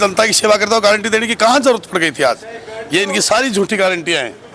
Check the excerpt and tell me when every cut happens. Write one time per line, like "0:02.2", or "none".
none